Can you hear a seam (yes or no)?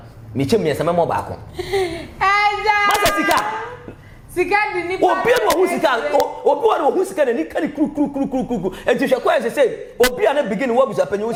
no